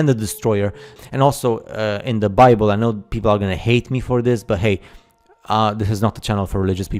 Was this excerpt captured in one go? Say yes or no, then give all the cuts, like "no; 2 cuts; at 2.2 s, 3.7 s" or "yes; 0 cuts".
no; 1 cut; at 1.0 s